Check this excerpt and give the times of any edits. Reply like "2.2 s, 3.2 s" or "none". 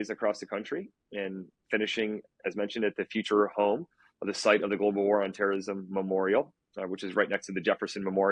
none